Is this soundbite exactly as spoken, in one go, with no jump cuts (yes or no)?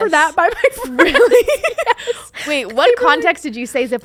yes